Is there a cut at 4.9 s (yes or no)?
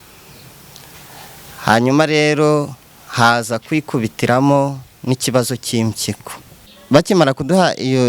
no